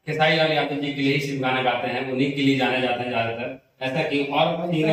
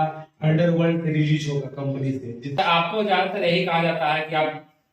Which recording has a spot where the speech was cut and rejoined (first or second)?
second